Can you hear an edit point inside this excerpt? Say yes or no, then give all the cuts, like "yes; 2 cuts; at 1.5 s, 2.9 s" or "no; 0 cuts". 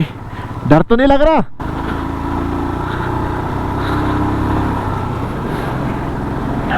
no; 0 cuts